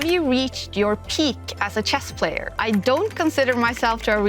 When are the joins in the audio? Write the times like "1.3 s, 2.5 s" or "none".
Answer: 2.5 s